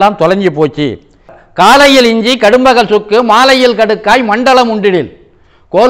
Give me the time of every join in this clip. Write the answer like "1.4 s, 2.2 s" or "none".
1.4 s